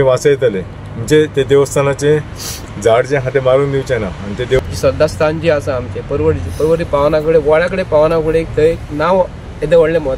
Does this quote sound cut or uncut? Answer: cut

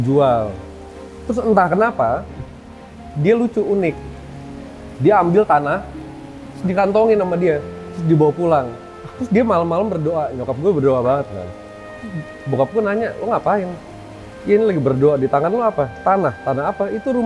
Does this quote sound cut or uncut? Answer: uncut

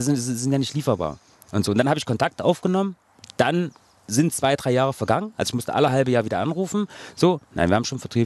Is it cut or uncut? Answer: uncut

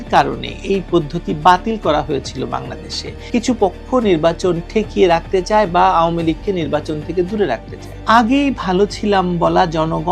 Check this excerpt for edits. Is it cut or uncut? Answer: cut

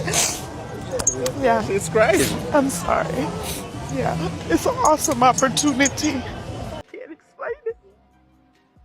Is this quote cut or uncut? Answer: cut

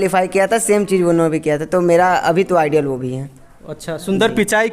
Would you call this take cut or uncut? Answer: uncut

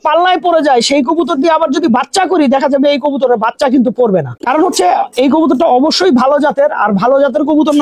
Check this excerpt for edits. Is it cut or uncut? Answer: uncut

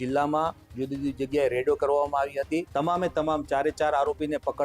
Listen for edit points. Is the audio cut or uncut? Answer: cut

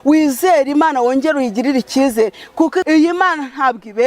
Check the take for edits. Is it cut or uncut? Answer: cut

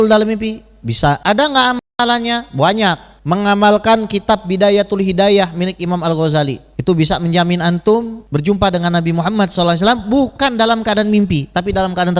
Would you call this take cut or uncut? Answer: cut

